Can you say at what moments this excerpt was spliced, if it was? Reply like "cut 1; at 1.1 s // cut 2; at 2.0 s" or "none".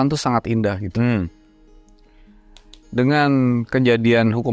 none